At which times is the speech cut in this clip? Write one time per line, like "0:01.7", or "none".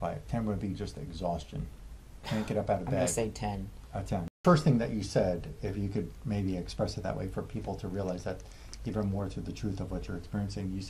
0:04.4